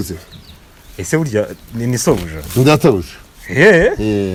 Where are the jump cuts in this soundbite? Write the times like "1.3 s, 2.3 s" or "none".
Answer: none